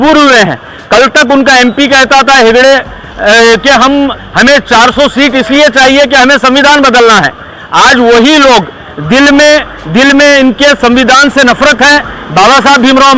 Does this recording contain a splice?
no; 0 cuts

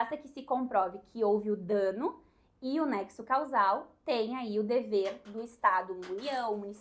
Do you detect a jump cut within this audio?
no; 0 cuts

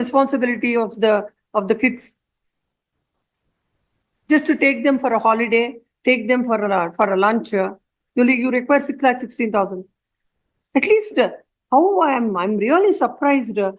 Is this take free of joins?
yes; 0 cuts

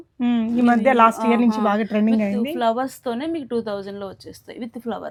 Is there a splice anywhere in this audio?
no; 0 cuts

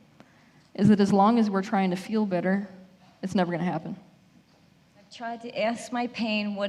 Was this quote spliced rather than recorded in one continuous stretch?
yes; 1 cut; at 5.2 s

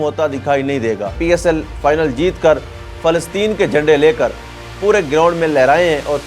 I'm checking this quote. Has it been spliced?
yes; 1 cut; at 1.2 s

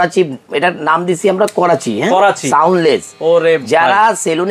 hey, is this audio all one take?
yes; 0 cuts

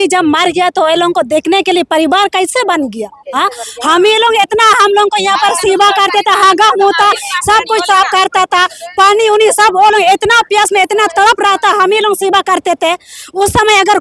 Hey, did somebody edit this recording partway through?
no; 0 cuts

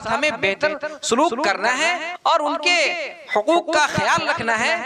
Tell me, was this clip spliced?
no; 0 cuts

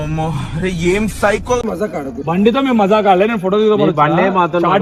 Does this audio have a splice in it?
no; 0 cuts

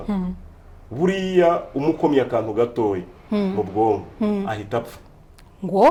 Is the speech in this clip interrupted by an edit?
no; 0 cuts

